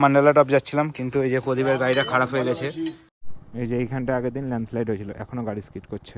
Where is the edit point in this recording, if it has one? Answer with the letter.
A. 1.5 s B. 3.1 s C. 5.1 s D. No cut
B